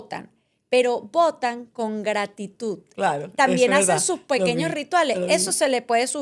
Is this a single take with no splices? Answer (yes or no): yes